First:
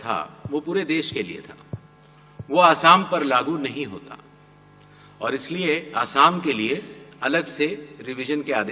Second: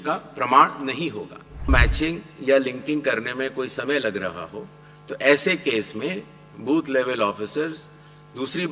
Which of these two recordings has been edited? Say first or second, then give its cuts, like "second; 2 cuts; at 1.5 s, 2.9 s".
second; 1 cut; at 1.7 s